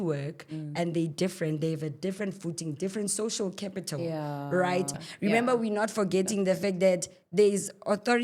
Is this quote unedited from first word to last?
no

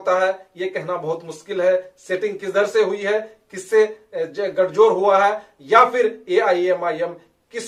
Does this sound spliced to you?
no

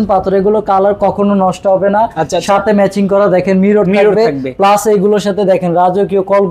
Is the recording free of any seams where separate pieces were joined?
yes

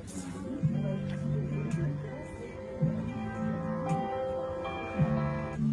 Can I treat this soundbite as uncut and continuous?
no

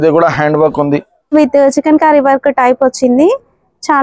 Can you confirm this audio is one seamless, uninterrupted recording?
no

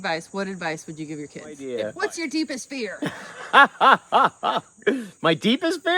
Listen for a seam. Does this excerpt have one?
yes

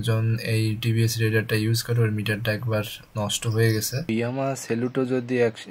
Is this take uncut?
no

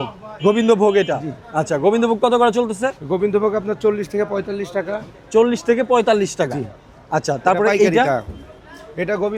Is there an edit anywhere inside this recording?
no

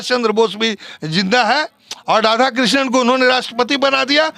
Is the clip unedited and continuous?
yes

